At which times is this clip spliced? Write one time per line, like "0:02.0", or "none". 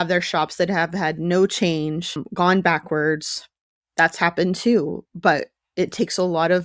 0:02.2